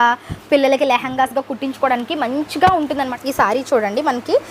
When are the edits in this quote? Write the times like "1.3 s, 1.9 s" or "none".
3.1 s

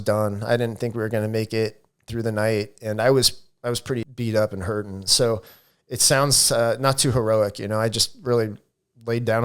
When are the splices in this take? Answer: 4.1 s

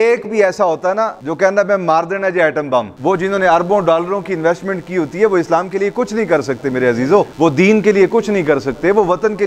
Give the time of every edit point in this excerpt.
1.2 s, 2.9 s

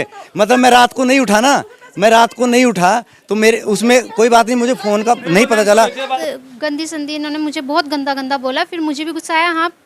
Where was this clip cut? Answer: 6.1 s

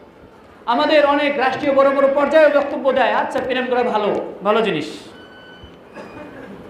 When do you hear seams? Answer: none

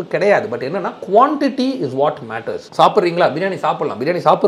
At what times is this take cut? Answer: 2.6 s

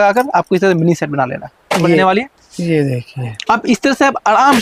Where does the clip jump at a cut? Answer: 2.0 s

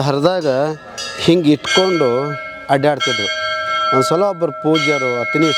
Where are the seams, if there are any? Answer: none

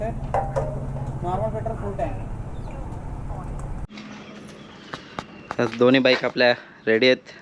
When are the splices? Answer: 3.9 s

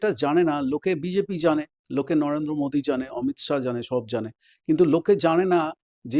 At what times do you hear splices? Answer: none

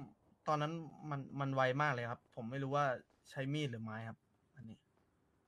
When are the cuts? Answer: none

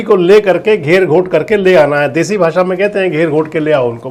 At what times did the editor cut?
none

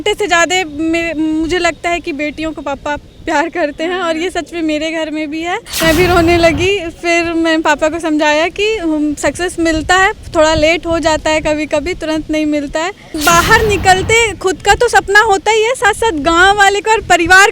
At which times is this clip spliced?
5.7 s, 13.1 s

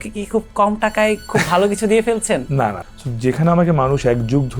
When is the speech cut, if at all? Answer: 2.8 s

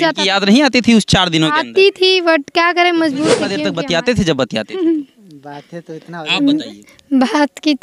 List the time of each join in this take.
3.6 s

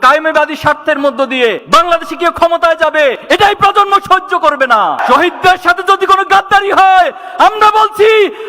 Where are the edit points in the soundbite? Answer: 5.0 s

